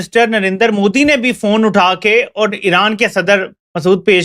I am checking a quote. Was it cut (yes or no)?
no